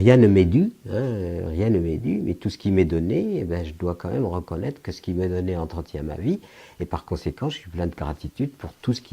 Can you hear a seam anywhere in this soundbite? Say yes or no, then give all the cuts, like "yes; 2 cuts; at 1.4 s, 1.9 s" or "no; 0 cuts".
yes; 1 cut; at 5.1 s